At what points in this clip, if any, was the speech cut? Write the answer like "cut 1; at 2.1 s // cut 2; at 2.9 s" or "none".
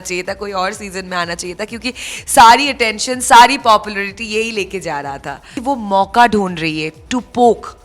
cut 1; at 5.5 s